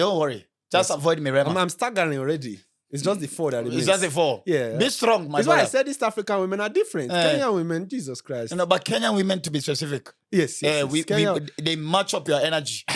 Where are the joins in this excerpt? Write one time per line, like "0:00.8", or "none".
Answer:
none